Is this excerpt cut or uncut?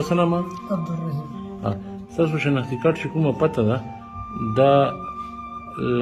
uncut